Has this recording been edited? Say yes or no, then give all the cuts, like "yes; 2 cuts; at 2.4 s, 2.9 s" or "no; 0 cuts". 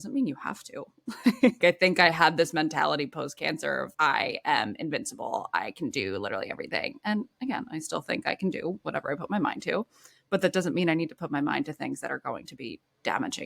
yes; 1 cut; at 1.6 s